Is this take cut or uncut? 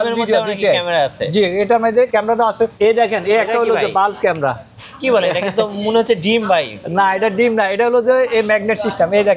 cut